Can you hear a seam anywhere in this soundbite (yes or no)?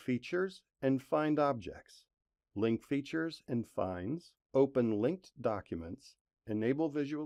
no